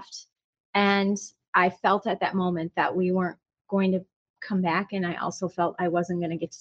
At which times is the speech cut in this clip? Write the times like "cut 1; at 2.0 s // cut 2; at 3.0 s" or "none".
cut 1; at 1.4 s

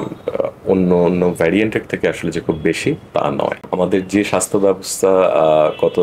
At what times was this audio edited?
cut 1; at 3.6 s

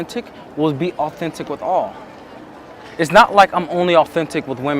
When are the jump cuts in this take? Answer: none

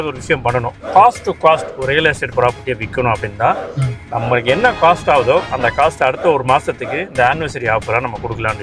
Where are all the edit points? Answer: none

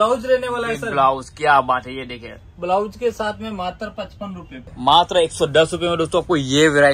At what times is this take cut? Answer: cut 1; at 4.6 s

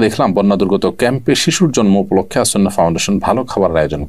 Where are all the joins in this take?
none

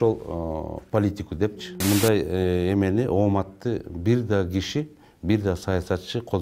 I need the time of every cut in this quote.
cut 1; at 1.7 s

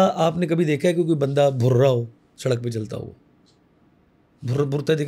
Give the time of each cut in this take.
none

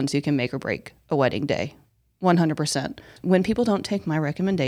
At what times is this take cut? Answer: cut 1; at 3.1 s

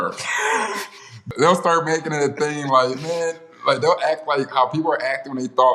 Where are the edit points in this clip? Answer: cut 1; at 1.2 s

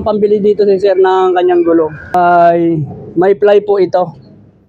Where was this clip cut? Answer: cut 1; at 2.1 s

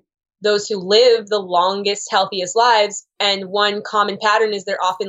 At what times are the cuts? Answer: none

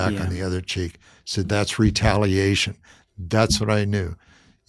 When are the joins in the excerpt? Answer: none

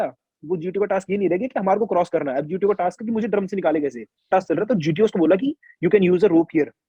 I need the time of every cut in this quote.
cut 1; at 4.3 s

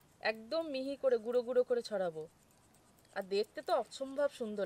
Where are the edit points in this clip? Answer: none

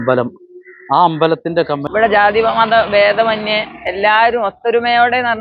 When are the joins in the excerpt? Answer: cut 1; at 1.8 s

